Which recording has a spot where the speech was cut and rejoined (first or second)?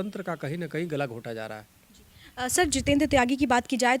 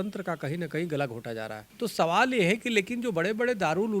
second